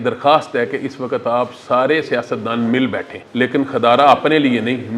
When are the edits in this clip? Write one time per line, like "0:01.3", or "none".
0:03.2